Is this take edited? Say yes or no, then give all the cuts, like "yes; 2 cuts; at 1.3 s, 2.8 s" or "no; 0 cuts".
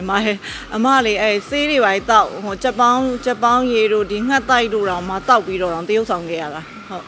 no; 0 cuts